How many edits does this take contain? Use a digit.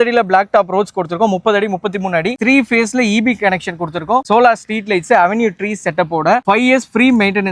1